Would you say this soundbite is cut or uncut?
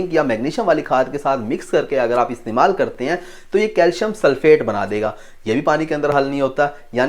uncut